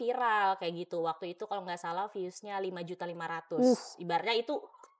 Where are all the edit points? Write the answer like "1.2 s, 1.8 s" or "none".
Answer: none